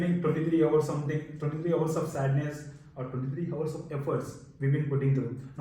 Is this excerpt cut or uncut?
uncut